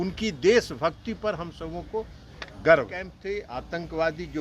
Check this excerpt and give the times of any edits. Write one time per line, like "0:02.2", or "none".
0:03.1